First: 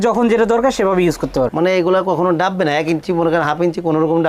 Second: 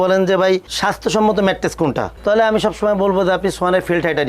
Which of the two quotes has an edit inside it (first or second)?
first